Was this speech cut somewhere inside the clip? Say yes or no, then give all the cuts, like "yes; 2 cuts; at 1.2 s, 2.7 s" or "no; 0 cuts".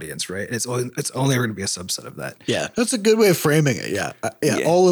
yes; 1 cut; at 2.5 s